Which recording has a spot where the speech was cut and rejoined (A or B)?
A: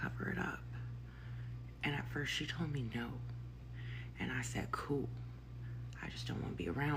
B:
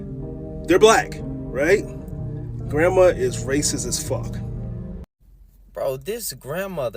B